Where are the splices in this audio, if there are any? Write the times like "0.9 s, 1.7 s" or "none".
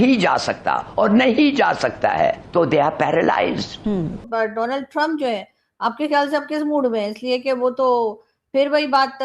none